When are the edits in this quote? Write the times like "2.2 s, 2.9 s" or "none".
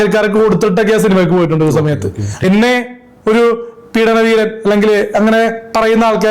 2.4 s